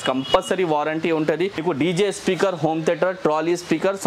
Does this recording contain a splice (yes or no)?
yes